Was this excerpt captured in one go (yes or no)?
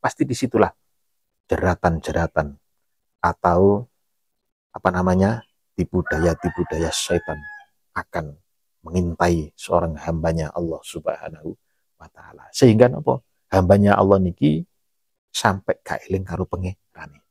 yes